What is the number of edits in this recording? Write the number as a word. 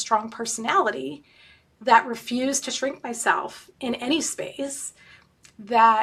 zero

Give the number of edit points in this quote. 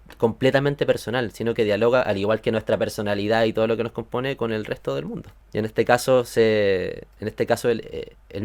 one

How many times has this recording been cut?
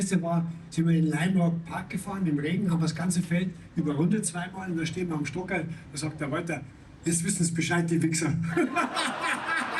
zero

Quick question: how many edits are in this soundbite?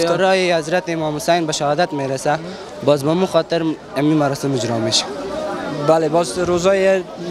zero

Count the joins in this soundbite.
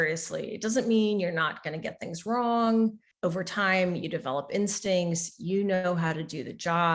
one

